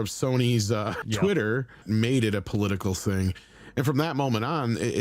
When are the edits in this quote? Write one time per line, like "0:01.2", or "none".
0:01.0
0:01.8